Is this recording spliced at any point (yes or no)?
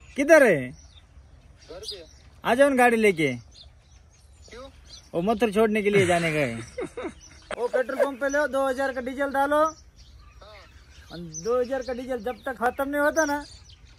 no